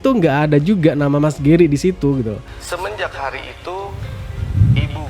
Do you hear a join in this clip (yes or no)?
yes